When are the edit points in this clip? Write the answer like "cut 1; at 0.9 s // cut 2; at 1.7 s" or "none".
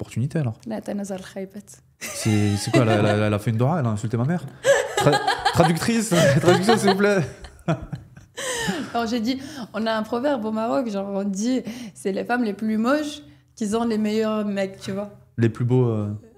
none